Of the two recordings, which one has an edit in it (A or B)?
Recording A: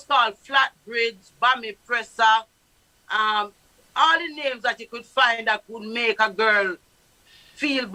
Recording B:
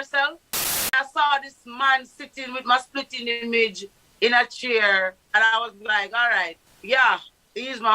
B